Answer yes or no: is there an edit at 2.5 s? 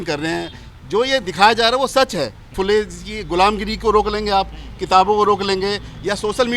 yes